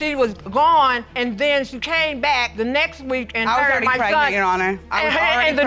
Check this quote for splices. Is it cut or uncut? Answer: uncut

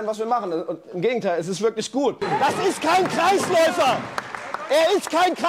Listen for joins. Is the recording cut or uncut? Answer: cut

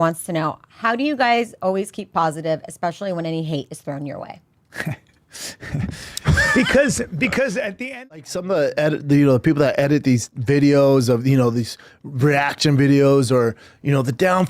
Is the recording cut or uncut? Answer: cut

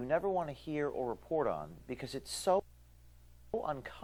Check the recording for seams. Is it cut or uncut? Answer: uncut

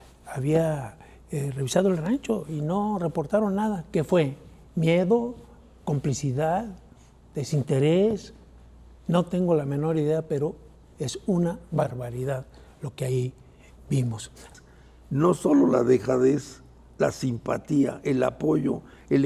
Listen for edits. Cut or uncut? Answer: cut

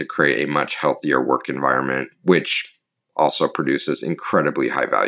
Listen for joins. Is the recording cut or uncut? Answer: cut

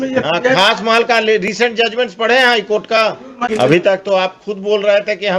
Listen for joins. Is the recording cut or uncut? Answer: cut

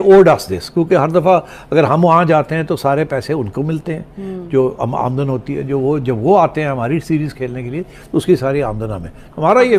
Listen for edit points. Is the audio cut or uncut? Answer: uncut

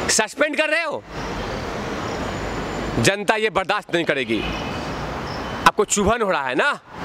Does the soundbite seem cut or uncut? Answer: uncut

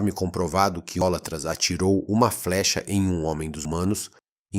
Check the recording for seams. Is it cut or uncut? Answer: cut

